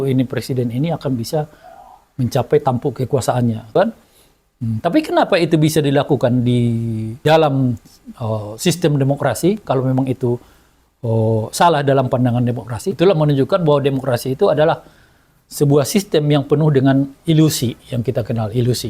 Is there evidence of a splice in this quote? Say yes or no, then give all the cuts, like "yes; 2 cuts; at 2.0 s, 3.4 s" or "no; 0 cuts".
yes; 3 cuts; at 3.8 s, 7.1 s, 12.8 s